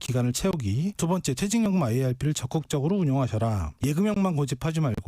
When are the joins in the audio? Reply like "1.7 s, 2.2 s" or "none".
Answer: 0.9 s